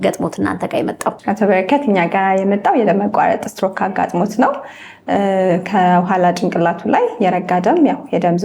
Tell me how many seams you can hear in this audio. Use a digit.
0